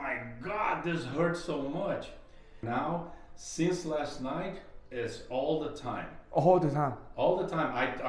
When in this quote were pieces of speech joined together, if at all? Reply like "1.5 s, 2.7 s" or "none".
2.6 s